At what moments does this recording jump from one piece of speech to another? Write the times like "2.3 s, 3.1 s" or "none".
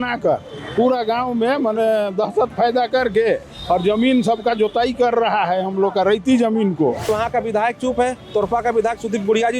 7.1 s